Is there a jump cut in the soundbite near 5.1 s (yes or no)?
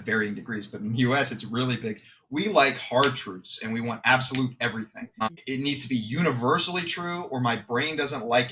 yes